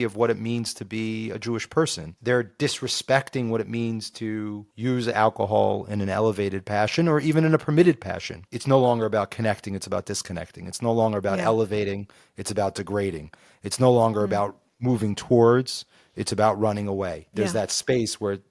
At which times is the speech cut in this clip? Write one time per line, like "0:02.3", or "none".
none